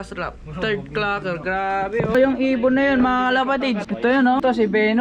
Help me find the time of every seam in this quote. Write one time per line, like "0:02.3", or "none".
0:02.1
0:03.9